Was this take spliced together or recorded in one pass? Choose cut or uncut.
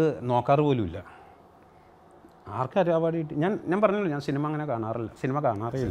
uncut